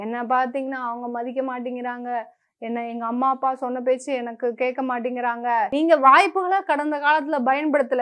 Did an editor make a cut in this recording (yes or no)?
yes